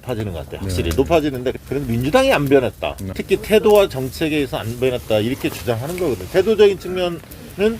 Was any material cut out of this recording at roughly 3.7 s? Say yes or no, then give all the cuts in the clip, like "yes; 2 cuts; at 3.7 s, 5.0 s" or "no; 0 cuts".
no; 1 cut; at 1.5 s